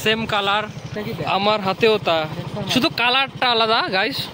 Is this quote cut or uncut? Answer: cut